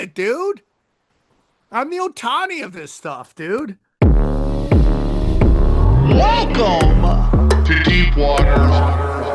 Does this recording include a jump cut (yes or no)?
yes